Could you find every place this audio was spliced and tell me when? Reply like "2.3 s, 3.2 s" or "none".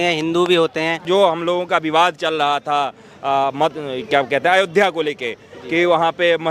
1.1 s

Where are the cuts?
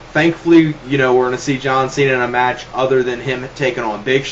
none

